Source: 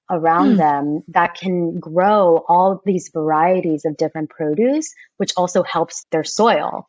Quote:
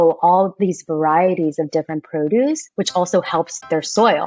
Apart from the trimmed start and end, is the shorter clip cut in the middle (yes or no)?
yes